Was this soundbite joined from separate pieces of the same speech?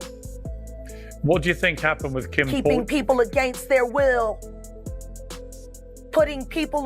yes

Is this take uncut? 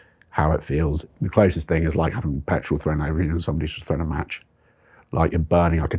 no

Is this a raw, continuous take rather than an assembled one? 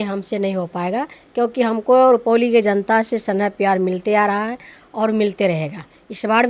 yes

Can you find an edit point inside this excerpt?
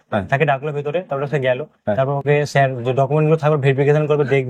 no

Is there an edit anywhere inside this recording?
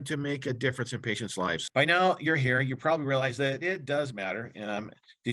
yes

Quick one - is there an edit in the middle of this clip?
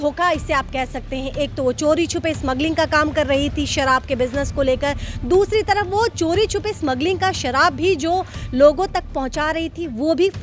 no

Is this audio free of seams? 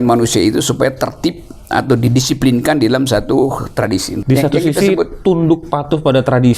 no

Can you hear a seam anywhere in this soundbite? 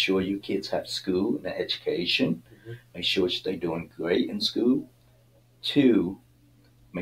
no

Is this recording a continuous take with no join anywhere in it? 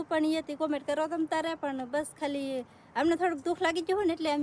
yes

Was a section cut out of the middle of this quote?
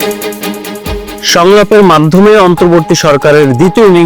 yes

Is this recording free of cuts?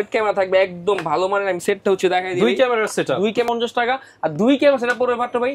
no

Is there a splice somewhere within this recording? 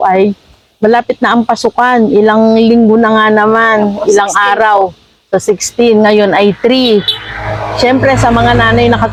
no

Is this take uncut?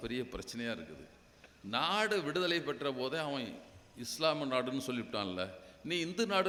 yes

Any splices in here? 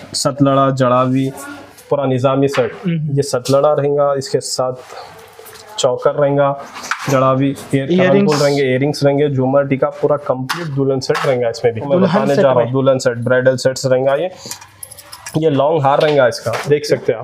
yes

